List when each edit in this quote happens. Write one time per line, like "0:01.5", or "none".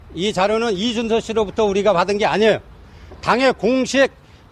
0:02.1